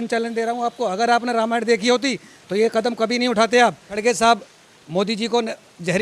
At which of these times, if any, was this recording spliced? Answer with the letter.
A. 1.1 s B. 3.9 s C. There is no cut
B